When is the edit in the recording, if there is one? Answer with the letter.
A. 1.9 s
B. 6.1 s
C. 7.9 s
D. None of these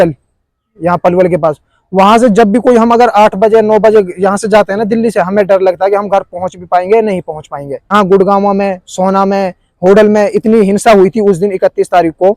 C